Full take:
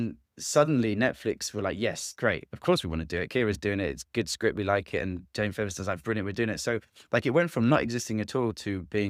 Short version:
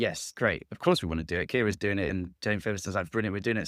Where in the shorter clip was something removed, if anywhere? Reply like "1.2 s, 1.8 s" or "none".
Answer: 2.1 s